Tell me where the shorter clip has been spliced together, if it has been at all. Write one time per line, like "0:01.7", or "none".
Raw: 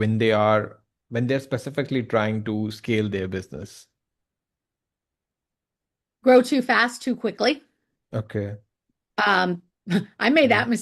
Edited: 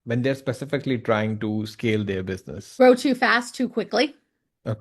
0:02.6